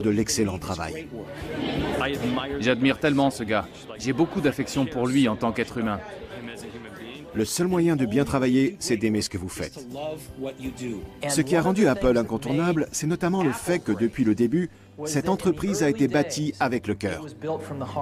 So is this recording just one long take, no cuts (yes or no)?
yes